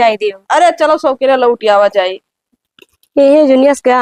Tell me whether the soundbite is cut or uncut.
uncut